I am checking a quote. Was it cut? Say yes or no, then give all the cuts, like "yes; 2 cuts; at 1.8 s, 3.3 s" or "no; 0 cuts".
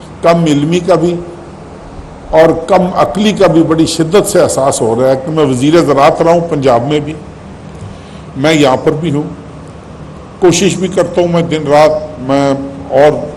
no; 0 cuts